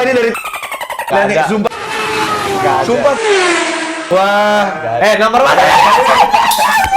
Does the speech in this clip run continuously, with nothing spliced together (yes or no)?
no